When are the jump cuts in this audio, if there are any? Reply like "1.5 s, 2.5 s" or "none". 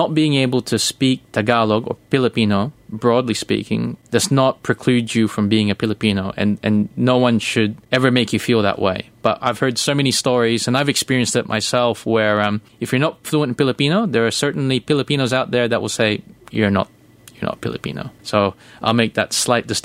4.0 s, 7.8 s, 12.7 s, 18.1 s